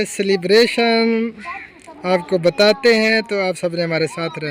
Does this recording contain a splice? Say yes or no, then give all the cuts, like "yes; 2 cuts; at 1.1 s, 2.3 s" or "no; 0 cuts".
no; 0 cuts